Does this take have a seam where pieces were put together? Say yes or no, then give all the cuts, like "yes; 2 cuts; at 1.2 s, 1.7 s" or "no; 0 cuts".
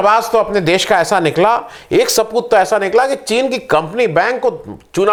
no; 0 cuts